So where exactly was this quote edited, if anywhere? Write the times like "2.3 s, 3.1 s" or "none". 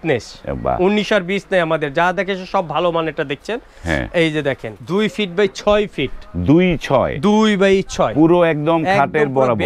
4.7 s

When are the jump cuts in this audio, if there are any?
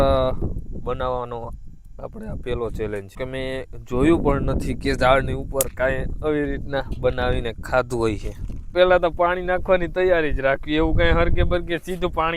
3.2 s, 8.7 s

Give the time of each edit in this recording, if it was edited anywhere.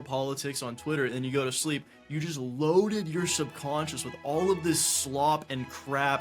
none

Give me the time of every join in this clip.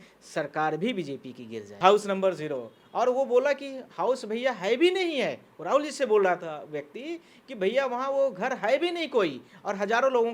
1.7 s

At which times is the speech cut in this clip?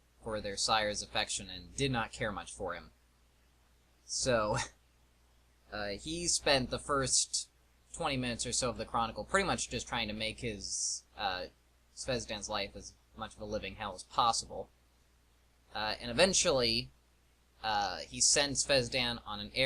4.4 s

